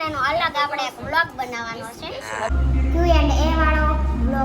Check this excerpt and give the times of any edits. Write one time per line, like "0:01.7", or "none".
0:02.5